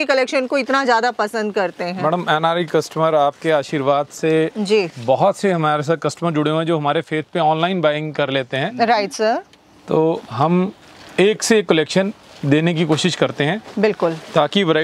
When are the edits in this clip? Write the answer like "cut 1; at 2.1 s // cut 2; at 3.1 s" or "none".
none